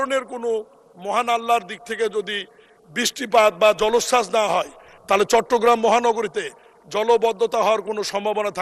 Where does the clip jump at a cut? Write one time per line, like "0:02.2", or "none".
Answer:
none